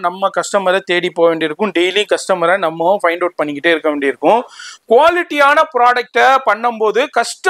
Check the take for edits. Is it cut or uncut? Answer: uncut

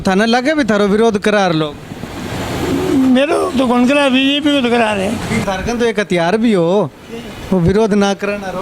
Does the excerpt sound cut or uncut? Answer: cut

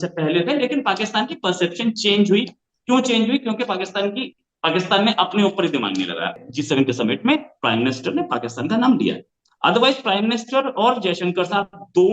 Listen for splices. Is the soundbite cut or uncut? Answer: cut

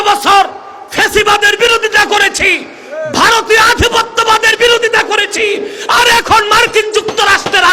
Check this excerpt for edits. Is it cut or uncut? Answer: uncut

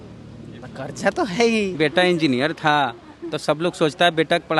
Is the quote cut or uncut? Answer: cut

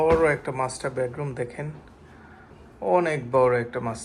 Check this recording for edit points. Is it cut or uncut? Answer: uncut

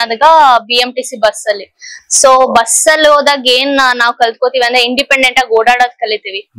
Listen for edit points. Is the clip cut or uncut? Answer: uncut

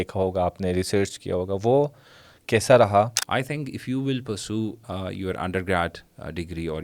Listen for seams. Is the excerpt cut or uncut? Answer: cut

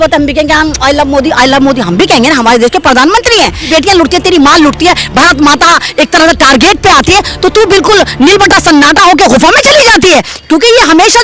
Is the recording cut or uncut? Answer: cut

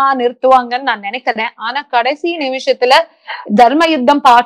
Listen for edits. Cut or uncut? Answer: uncut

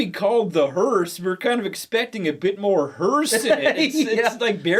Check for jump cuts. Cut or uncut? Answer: uncut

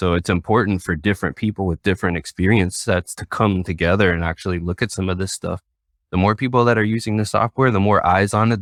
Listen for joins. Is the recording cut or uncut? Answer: uncut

